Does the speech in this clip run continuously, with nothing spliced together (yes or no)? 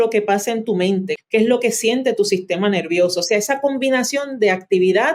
no